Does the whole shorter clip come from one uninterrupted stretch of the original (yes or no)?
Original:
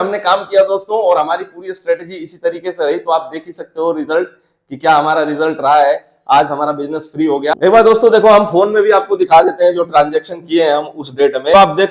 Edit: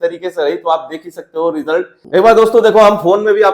no